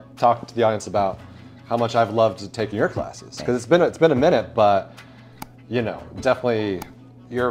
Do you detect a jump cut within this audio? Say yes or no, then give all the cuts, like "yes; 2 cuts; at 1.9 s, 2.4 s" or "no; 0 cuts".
no; 0 cuts